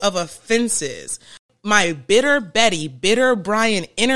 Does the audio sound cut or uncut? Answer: cut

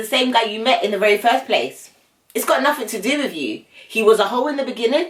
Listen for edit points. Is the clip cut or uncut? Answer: uncut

